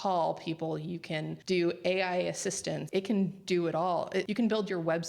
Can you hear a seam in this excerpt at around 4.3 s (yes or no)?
yes